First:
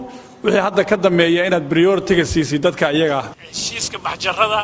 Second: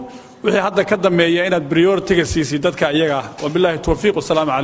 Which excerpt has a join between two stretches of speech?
first; 1 cut; at 3.3 s

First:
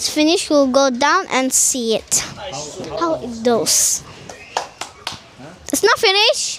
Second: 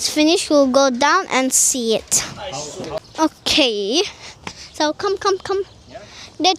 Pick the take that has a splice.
second; 1 cut; at 3.0 s

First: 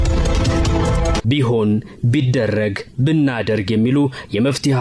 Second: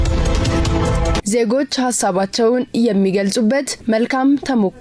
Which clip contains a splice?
second; 2 cuts; at 1.2 s, 3.7 s

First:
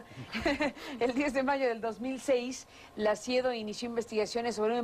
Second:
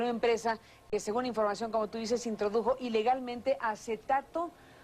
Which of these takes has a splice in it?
first; 1 cut; at 3.1 s

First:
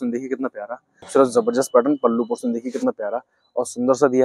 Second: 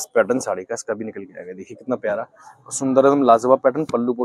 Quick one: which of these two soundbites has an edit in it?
first; 1 cut; at 1.1 s

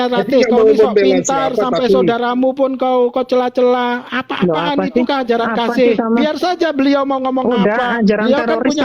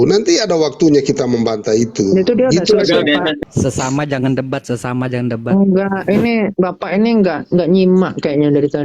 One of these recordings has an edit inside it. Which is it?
second; 1 cut; at 3.4 s

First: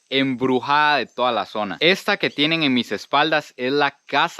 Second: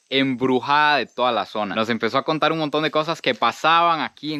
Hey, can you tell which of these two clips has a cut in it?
first; 1 cut; at 1.7 s

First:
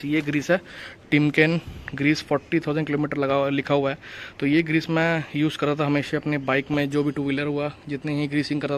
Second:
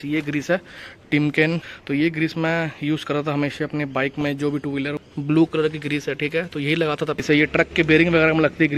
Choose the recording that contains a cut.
second; 3 cuts; at 1.7 s, 5.0 s, 7.2 s

